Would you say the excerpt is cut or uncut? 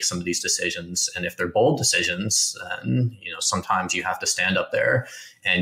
uncut